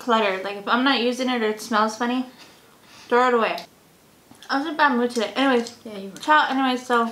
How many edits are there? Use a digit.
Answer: 1